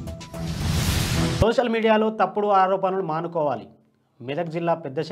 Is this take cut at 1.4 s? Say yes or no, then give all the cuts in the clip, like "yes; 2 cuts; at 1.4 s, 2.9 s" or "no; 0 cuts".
yes; 1 cut; at 1.4 s